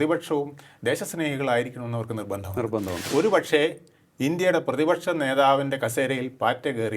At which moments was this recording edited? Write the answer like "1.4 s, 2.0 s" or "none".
3.0 s